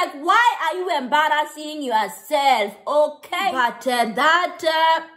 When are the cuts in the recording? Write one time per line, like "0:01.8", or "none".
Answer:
0:03.5

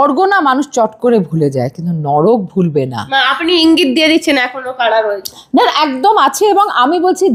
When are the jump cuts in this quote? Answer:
none

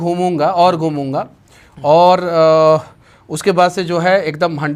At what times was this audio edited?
none

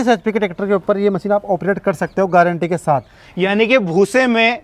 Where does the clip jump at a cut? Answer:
0:03.2

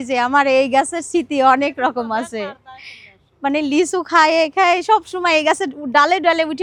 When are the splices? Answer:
none

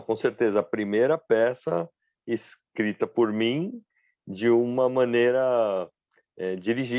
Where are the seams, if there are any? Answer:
none

